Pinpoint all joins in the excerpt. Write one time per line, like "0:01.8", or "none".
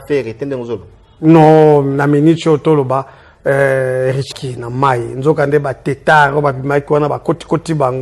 0:04.3